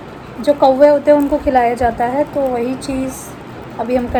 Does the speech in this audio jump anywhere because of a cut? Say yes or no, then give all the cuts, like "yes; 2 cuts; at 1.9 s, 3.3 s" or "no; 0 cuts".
no; 0 cuts